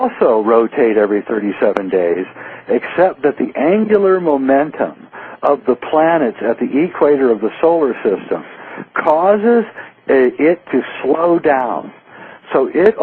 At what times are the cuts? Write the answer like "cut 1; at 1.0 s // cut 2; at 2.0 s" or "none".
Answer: cut 1; at 9.9 s